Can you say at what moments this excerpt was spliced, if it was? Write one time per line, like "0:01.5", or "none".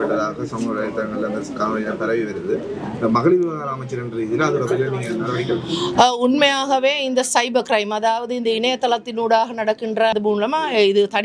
0:10.1